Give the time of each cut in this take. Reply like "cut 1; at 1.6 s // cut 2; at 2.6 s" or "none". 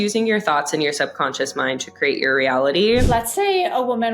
cut 1; at 3.1 s